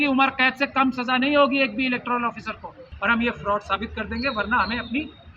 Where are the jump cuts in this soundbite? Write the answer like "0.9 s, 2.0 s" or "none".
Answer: 2.9 s